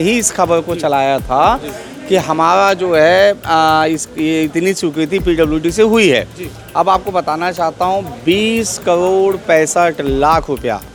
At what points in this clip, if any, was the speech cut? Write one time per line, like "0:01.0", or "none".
none